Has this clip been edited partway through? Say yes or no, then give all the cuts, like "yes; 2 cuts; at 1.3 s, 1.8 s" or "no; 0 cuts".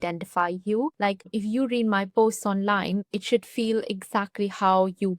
yes; 2 cuts; at 1.2 s, 3.1 s